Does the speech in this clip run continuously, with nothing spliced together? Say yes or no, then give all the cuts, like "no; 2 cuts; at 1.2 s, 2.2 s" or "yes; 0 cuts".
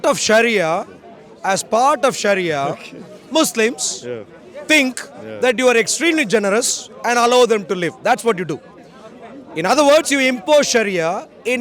yes; 0 cuts